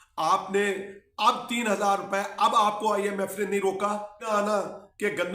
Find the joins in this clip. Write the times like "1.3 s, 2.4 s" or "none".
4.3 s